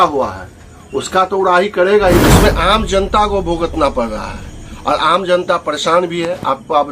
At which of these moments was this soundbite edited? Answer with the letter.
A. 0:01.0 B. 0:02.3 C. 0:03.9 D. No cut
B